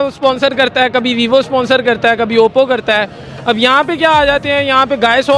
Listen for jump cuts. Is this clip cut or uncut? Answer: uncut